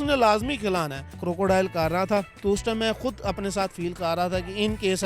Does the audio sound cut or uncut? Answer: cut